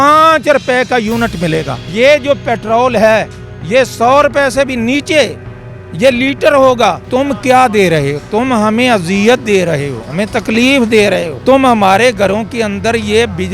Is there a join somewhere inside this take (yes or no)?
yes